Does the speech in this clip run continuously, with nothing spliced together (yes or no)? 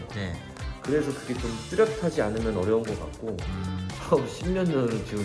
no